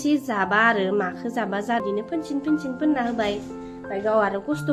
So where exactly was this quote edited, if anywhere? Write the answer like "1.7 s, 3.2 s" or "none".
1.8 s